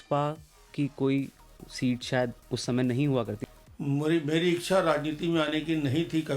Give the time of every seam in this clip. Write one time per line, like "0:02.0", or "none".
0:03.4